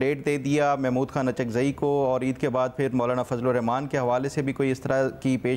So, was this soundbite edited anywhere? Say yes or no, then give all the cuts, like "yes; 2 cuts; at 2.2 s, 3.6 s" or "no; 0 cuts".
no; 0 cuts